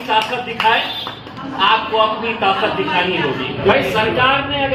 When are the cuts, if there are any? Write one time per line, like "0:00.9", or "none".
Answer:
0:03.6